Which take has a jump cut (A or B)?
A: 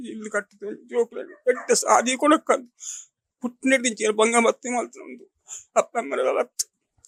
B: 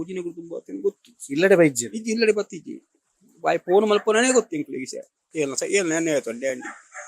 B